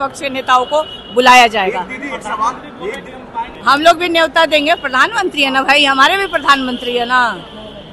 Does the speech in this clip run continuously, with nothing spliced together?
no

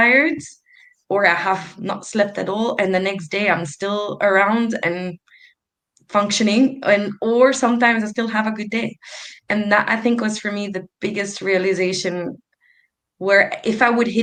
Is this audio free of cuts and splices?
yes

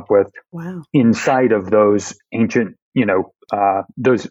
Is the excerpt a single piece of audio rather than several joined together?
yes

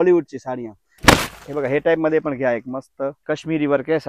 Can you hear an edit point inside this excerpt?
yes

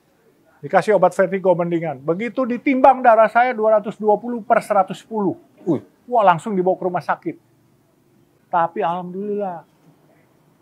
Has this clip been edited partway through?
yes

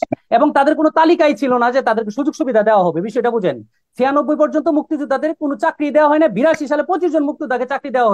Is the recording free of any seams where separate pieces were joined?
yes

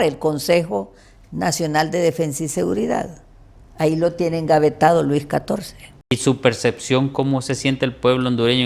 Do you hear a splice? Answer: yes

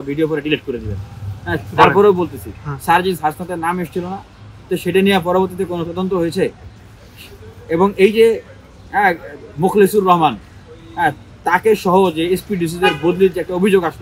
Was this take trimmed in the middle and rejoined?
no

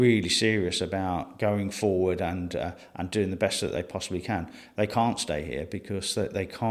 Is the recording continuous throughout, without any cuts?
no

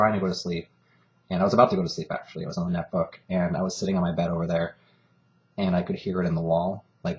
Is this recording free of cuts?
no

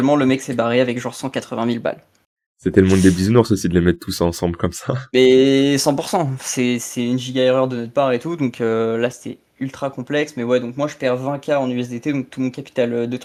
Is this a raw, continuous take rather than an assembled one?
yes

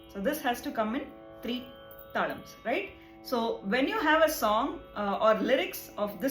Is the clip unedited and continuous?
no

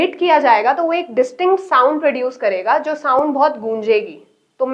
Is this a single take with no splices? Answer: yes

